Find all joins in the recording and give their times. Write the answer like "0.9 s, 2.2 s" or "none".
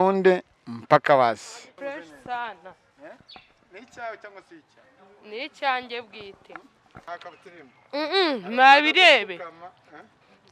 1.6 s, 7.0 s